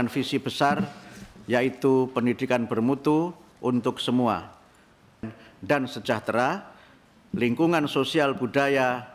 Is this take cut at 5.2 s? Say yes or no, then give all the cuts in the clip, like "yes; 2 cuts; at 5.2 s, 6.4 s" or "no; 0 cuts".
yes; 1 cut; at 5.2 s